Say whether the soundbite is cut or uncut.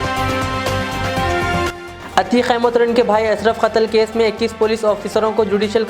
cut